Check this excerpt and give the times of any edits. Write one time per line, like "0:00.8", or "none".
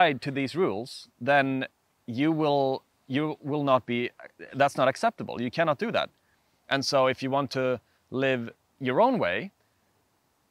none